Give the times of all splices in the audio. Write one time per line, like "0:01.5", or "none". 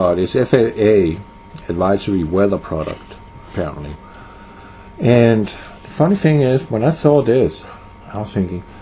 0:05.4